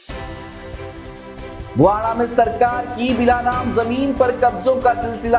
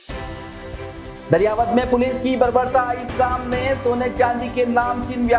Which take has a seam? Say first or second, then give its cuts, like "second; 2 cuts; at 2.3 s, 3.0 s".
first; 1 cut; at 1.3 s